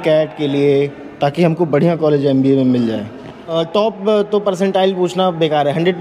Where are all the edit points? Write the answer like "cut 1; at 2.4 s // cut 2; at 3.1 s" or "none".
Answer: cut 1; at 3.5 s